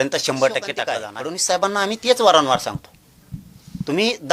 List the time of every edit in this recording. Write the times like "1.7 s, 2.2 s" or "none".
1.0 s